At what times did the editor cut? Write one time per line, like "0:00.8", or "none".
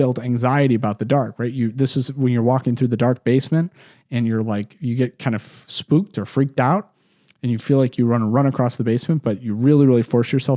none

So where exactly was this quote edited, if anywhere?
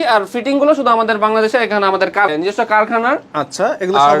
0:02.3

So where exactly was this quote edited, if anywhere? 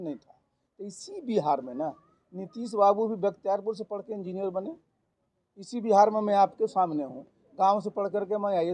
none

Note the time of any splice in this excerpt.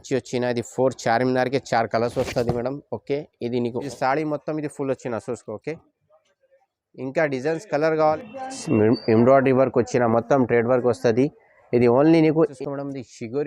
0:03.8
0:08.0
0:12.5

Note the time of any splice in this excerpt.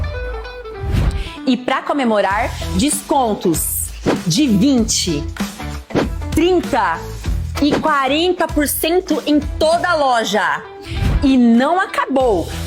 none

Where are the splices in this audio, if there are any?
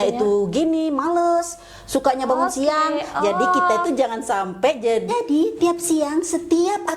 0:05.1

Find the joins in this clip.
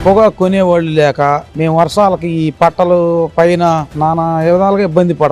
0:03.9

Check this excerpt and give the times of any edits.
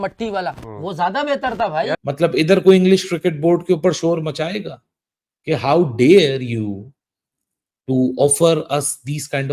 0:02.0

